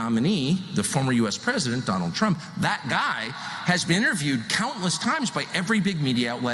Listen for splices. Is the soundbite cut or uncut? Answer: uncut